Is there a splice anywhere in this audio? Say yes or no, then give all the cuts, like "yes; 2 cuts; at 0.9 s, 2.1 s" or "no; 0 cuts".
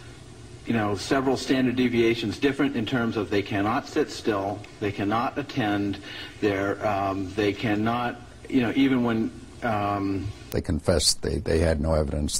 yes; 1 cut; at 10.5 s